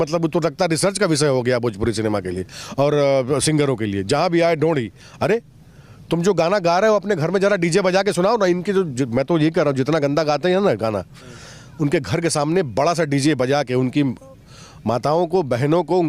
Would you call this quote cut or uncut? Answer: uncut